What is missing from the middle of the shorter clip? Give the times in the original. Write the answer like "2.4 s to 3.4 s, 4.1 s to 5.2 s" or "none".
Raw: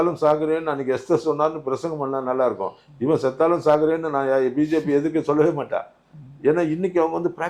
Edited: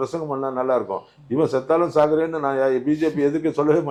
none